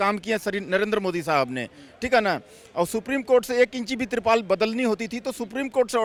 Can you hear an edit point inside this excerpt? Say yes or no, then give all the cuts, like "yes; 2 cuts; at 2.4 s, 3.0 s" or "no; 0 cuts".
no; 0 cuts